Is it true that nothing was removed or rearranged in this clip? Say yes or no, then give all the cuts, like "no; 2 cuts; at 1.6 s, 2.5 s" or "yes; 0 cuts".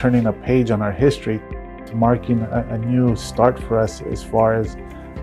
no; 1 cut; at 1.4 s